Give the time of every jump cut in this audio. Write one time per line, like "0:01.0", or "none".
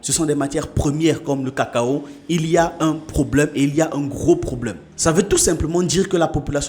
none